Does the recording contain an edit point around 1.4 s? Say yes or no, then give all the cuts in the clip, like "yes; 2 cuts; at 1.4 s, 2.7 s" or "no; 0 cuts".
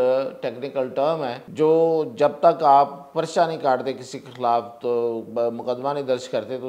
yes; 1 cut; at 1.4 s